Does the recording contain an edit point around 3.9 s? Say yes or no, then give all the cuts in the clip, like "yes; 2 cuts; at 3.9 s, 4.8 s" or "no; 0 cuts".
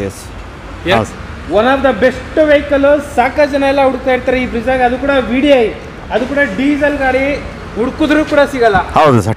no; 1 cut; at 0.9 s